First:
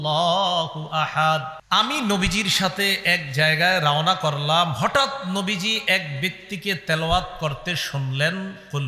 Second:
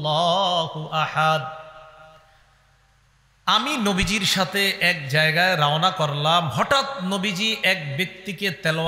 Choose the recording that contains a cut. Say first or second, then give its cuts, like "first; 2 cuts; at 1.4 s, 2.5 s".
first; 1 cut; at 1.5 s